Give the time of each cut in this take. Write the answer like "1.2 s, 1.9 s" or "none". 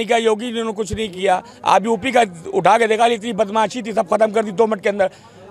none